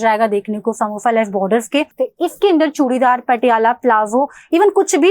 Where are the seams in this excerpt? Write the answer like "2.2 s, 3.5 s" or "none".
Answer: 2.0 s